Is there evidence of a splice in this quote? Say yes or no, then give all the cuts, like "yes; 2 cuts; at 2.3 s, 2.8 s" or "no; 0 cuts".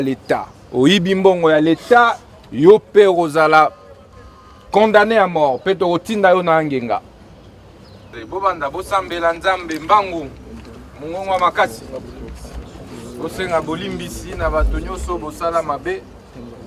yes; 1 cut; at 8.2 s